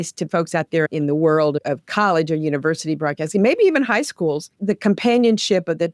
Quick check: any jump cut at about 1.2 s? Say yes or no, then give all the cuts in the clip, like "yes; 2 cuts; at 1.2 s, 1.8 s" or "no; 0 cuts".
no; 1 cut; at 4.5 s